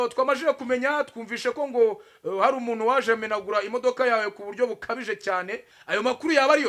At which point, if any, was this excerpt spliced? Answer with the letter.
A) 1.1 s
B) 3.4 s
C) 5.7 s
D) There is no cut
C